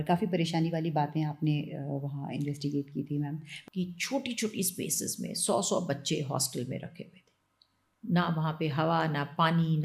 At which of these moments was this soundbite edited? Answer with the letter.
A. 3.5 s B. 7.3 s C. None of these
A